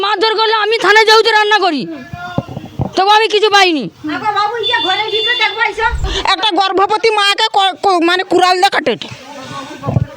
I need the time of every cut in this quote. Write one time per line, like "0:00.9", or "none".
0:06.1